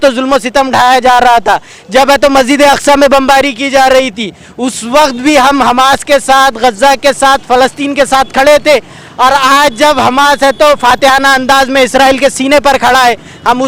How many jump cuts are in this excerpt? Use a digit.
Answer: 0